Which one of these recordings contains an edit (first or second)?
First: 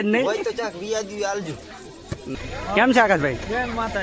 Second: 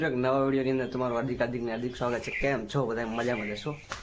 first